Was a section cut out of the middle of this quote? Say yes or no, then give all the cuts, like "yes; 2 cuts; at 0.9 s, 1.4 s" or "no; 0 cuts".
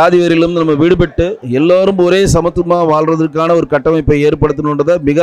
no; 0 cuts